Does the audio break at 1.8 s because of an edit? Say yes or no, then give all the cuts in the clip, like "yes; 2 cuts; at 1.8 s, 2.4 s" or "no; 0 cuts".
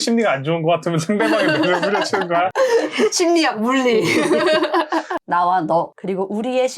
no; 1 cut; at 5.2 s